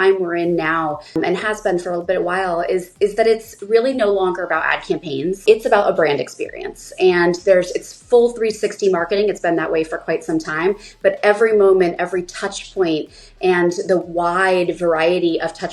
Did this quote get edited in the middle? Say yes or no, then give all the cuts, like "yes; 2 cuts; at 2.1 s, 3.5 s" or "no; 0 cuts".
yes; 2 cuts; at 1.1 s, 5.4 s